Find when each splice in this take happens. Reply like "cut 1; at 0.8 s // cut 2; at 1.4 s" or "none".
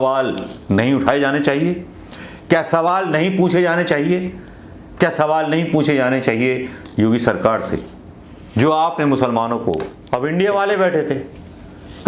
cut 1; at 9.9 s